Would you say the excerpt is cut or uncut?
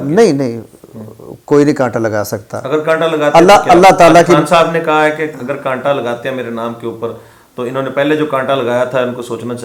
uncut